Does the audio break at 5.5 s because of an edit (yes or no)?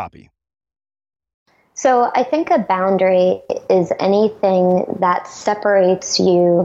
no